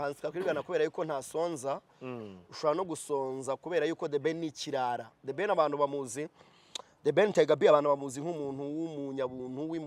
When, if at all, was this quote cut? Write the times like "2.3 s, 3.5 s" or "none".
none